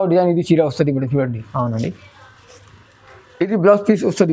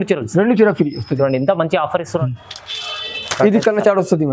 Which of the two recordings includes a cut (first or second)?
second